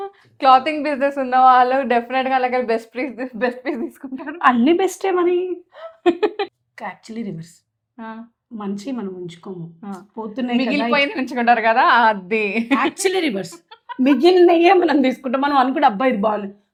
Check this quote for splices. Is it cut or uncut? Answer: uncut